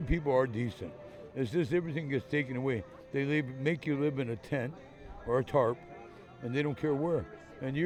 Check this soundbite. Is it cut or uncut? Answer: uncut